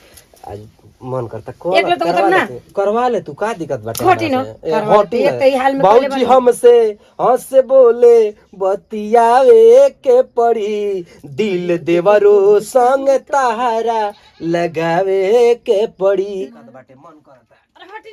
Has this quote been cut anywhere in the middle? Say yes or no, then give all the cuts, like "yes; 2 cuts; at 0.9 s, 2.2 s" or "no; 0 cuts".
yes; 1 cut; at 16.4 s